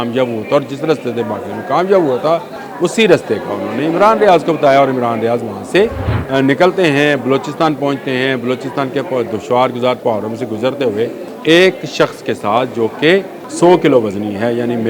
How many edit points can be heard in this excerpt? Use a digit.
4